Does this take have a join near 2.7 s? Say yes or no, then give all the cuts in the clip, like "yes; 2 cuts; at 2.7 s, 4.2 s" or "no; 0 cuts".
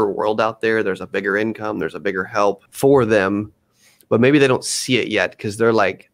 yes; 1 cut; at 2.7 s